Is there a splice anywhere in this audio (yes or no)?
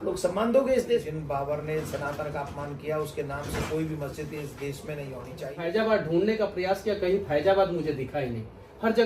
yes